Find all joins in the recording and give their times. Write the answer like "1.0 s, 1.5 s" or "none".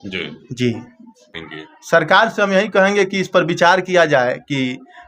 1.3 s